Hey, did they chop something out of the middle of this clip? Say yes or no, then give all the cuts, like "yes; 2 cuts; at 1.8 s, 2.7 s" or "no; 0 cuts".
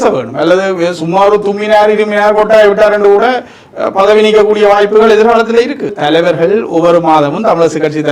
yes; 1 cut; at 5.9 s